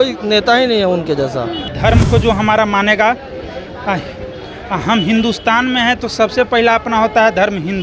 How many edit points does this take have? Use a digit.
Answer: 1